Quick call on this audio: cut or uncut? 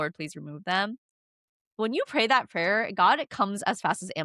cut